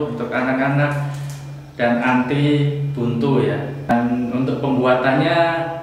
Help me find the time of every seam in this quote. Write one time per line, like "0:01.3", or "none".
0:03.9